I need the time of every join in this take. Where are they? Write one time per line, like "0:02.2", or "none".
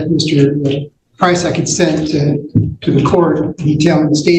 none